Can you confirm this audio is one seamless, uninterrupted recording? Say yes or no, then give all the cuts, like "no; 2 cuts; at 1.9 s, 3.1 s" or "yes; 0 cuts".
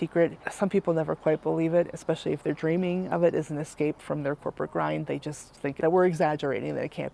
yes; 0 cuts